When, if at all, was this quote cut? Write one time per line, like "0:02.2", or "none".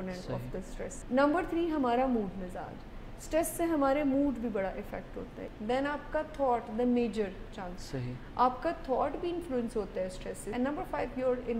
0:01.0
0:05.4
0:10.5